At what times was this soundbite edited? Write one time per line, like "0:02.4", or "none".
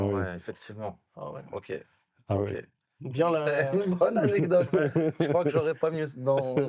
none